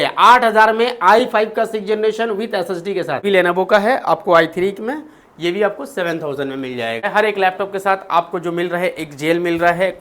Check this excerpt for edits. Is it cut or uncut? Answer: cut